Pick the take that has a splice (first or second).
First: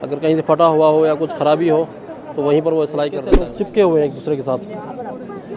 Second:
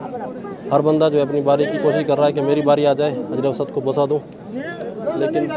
first